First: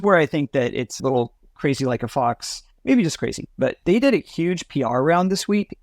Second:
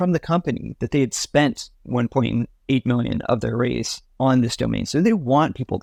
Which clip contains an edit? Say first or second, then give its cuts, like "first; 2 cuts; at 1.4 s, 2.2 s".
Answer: first; 1 cut; at 1.0 s